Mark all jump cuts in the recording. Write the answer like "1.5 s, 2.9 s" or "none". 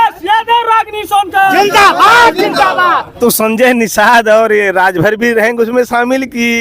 3.1 s